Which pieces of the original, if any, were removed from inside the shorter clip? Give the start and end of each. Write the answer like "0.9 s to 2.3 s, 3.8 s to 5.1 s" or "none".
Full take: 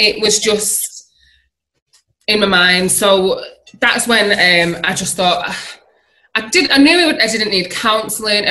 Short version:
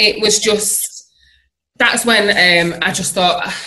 1.6 s to 3.6 s